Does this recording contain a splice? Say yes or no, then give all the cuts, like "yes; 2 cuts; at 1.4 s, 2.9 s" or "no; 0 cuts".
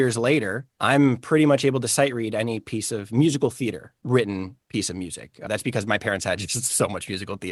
no; 0 cuts